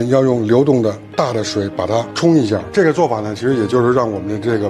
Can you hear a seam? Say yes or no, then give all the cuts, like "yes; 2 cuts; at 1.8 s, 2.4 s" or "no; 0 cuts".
yes; 1 cut; at 2.7 s